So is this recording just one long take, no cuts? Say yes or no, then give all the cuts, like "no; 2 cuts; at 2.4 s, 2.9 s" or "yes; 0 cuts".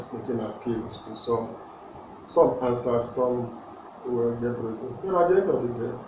yes; 0 cuts